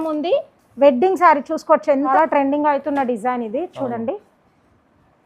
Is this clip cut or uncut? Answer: cut